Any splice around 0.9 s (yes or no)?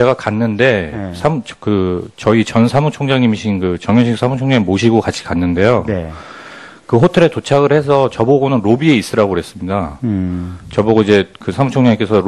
yes